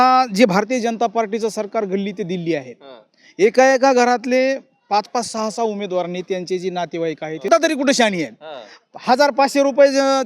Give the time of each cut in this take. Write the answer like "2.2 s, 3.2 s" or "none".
7.5 s

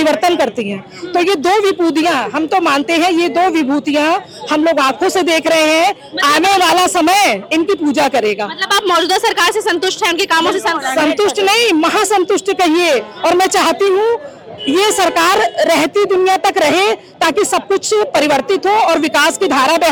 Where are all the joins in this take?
none

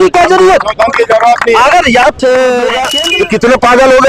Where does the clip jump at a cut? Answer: 2.9 s

